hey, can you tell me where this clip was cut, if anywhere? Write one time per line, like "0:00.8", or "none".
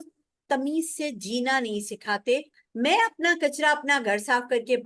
0:02.6